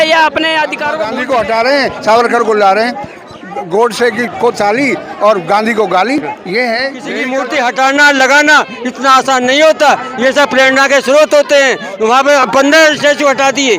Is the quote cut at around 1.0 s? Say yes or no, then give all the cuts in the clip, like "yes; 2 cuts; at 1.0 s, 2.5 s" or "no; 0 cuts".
yes; 2 cuts; at 1.0 s, 7.2 s